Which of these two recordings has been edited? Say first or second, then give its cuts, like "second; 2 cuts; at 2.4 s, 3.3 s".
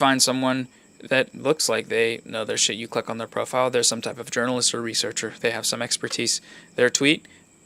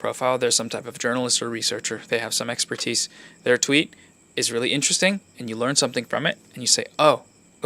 second; 1 cut; at 6.5 s